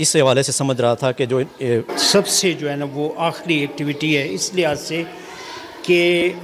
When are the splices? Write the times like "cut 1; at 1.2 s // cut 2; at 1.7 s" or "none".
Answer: cut 1; at 1.9 s